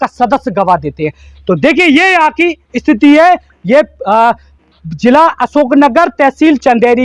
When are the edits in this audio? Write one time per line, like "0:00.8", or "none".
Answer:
none